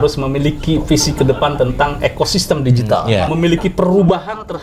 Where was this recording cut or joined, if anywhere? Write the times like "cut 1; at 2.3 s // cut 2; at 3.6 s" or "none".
cut 1; at 3.3 s

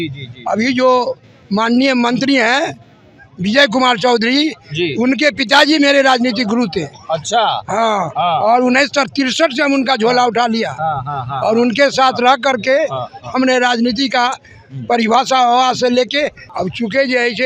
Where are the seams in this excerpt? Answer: cut 1; at 16.4 s

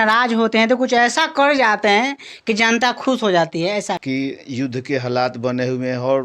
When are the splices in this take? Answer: cut 1; at 4.0 s

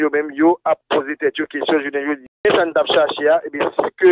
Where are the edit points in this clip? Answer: cut 1; at 2.3 s

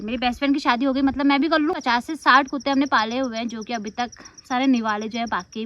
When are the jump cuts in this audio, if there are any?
cut 1; at 1.7 s

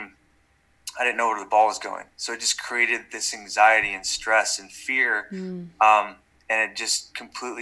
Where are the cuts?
none

